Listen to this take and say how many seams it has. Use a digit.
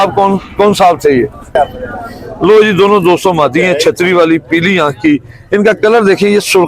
1